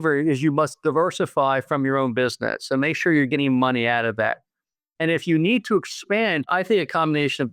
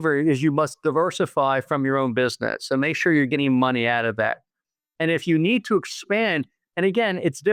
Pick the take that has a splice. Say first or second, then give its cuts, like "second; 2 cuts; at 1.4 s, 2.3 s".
first; 1 cut; at 6.5 s